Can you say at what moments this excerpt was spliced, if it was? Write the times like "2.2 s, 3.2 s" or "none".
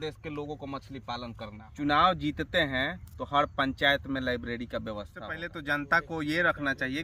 1.6 s, 5.5 s